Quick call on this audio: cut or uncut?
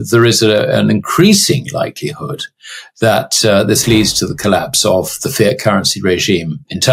uncut